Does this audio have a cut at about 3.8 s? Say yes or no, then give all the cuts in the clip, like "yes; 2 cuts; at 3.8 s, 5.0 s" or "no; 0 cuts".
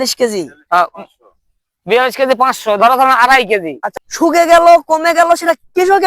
yes; 1 cut; at 3.8 s